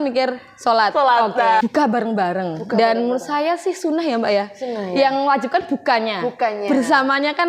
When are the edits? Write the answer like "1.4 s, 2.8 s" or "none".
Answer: 1.6 s